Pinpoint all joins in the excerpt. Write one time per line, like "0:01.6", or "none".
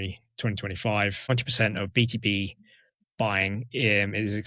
0:01.3